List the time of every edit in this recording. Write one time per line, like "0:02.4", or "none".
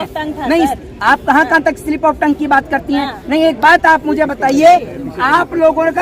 none